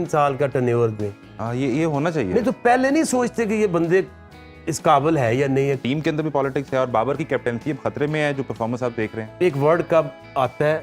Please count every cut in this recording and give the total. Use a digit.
2